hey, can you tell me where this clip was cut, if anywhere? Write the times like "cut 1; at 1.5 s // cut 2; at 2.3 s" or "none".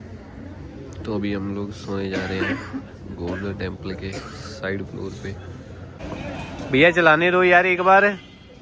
cut 1; at 6.0 s